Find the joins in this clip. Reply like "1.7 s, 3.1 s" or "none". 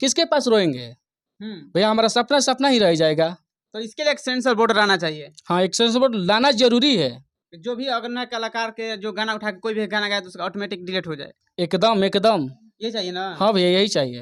none